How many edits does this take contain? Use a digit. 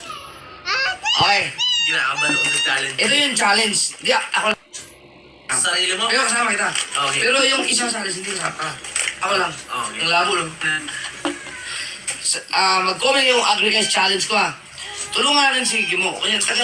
0